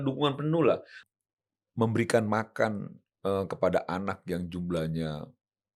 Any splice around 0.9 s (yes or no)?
yes